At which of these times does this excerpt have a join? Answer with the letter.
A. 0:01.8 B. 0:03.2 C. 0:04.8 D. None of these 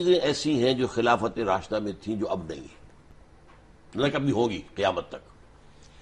D